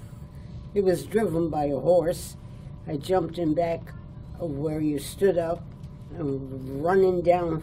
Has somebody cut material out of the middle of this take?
no; 0 cuts

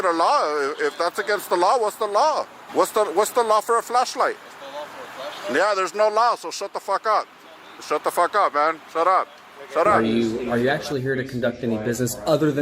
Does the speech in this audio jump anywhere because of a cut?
yes; 2 cuts; at 2.6 s, 10.0 s

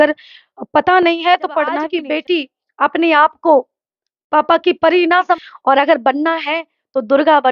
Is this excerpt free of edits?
no; 2 cuts; at 1.9 s, 5.4 s

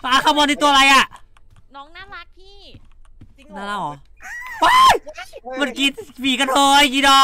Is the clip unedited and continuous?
yes; 0 cuts

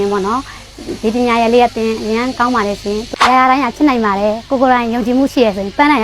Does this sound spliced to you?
yes; 1 cut; at 3.1 s

